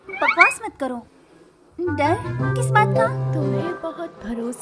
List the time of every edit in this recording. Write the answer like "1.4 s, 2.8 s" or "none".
3.2 s